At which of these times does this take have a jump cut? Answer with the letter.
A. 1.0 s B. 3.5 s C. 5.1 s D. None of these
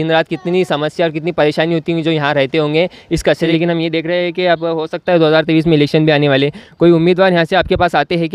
B